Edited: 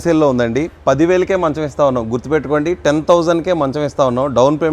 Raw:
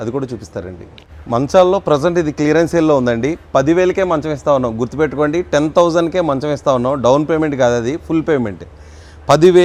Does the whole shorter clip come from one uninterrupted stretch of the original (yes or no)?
yes